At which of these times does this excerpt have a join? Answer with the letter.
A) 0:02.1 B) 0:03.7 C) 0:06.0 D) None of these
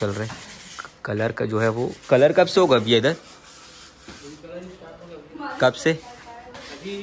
D